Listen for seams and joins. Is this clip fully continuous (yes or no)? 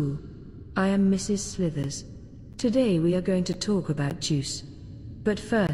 yes